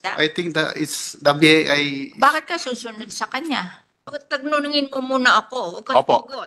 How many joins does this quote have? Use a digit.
1